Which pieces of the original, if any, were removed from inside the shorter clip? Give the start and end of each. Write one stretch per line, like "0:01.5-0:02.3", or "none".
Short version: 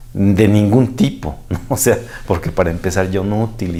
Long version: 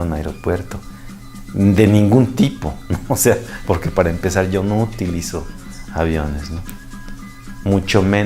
none